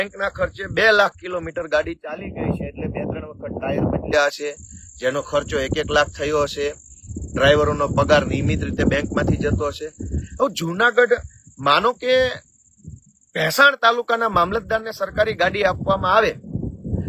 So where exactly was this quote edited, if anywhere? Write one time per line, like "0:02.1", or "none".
none